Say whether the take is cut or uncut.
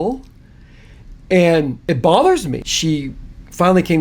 cut